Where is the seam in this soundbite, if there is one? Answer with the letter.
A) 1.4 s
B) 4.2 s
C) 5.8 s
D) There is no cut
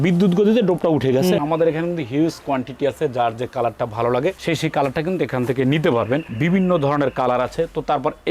A